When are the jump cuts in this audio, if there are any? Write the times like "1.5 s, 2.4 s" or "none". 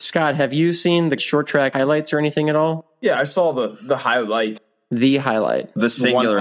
1.2 s, 2.9 s, 4.7 s